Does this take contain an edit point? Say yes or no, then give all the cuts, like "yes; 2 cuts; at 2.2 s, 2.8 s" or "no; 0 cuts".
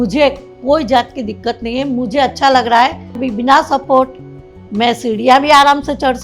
yes; 1 cut; at 3.2 s